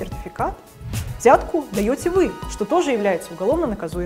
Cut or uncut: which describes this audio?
uncut